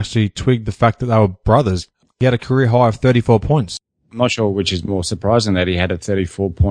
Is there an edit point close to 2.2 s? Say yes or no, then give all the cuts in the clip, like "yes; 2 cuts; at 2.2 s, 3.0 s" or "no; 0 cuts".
yes; 2 cuts; at 2.2 s, 3.8 s